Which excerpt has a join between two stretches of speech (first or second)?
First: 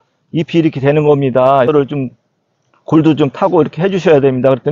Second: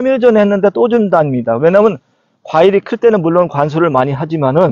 first